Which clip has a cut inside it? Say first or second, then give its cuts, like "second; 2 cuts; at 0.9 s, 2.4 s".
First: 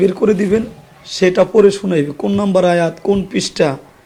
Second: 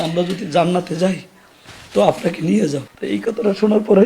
second; 1 cut; at 2.9 s